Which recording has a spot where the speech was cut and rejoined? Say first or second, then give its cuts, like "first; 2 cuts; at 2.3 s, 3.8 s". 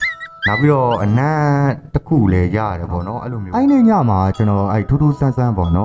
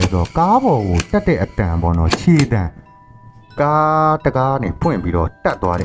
first; 1 cut; at 3.1 s